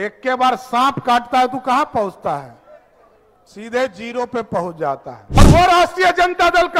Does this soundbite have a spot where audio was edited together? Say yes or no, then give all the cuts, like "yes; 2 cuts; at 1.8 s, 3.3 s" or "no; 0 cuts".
yes; 1 cut; at 5.4 s